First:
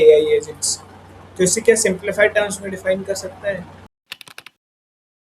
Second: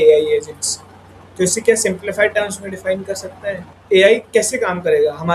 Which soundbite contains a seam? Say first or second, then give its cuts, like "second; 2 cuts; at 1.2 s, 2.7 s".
second; 1 cut; at 3.7 s